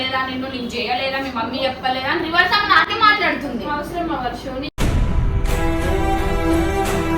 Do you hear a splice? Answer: no; 0 cuts

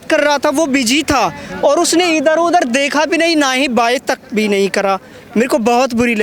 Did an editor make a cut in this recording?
no; 0 cuts

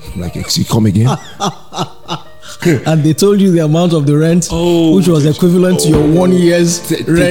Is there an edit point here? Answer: yes; 1 cut; at 2.6 s

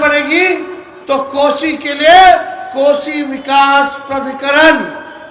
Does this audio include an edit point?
no; 0 cuts

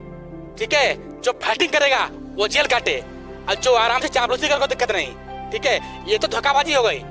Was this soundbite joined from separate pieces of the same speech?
no; 0 cuts

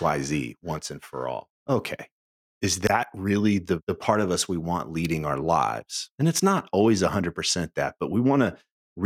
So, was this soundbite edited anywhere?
no; 0 cuts

